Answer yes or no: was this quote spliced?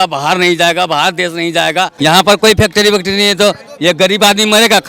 yes